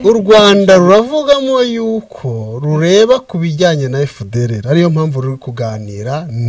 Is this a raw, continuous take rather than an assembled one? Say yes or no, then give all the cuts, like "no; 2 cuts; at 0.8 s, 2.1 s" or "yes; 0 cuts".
yes; 0 cuts